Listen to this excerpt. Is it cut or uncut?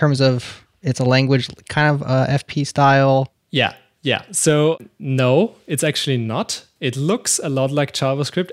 uncut